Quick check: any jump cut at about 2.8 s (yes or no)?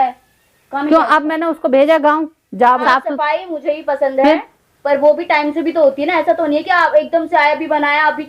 yes